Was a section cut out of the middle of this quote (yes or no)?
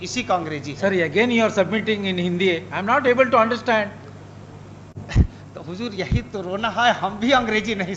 no